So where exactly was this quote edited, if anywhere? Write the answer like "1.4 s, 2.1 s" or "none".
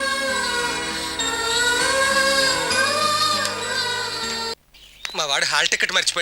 4.7 s

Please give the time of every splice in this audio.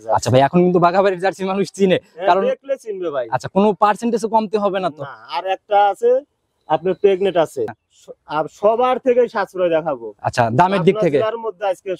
7.8 s

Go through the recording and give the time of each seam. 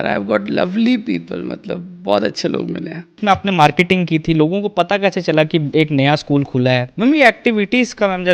3.2 s, 6.9 s

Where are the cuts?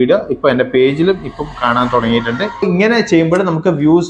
2.6 s

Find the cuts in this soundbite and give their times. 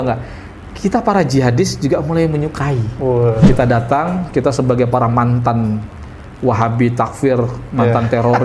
3.4 s

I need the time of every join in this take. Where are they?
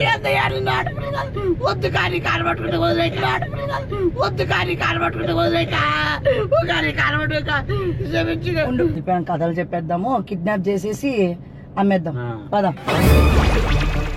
9.0 s

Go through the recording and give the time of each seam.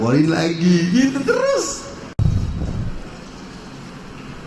2.2 s

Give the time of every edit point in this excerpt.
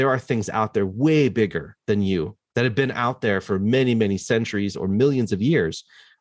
none

